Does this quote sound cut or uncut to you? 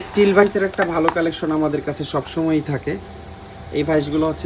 uncut